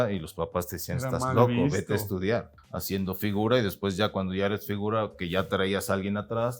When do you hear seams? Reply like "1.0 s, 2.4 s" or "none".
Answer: 2.6 s